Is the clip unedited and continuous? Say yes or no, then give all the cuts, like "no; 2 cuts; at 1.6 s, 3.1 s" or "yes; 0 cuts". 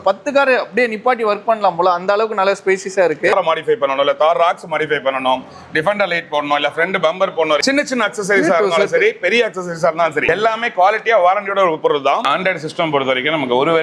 no; 4 cuts; at 3.3 s, 7.6 s, 10.2 s, 12.3 s